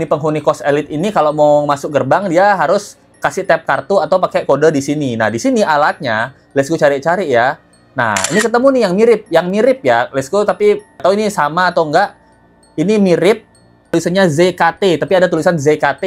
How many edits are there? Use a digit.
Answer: 0